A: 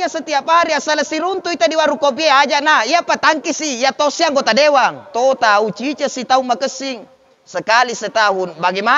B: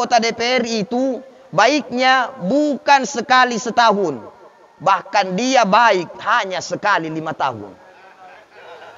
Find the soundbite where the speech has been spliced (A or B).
A